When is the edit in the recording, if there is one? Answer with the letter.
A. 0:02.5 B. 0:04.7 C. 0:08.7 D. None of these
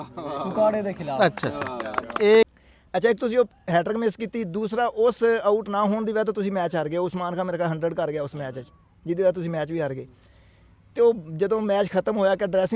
A